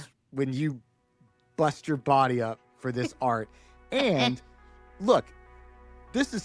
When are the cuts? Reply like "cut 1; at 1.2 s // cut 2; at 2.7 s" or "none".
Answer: none